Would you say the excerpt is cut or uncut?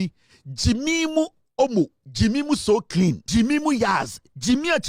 cut